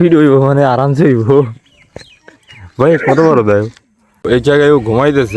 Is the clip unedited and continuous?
no; 1 cut; at 4.3 s

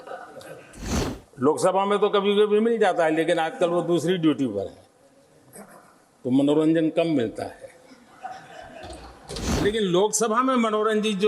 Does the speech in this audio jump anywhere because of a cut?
yes; 2 cuts; at 1.1 s, 9.6 s

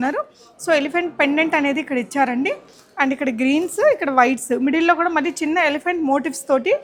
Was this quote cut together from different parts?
no; 0 cuts

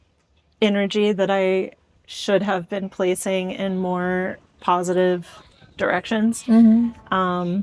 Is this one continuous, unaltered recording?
yes; 0 cuts

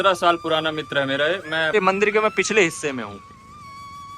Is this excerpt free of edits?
no; 1 cut; at 1.7 s

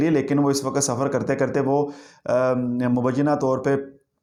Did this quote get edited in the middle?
no; 0 cuts

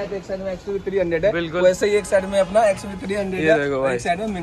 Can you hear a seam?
no; 0 cuts

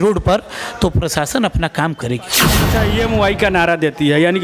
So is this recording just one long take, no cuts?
no; 1 cut; at 2.6 s

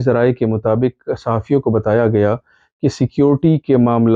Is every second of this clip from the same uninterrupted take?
yes; 0 cuts

